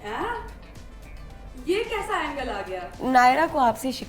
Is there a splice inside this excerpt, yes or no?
yes